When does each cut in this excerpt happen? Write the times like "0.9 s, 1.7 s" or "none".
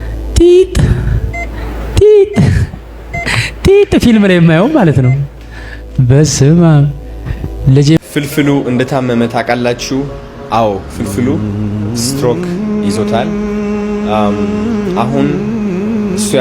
8.0 s